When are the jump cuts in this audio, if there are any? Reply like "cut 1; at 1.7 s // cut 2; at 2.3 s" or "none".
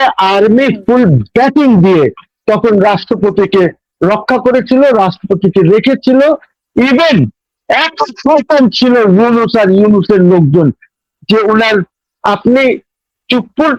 none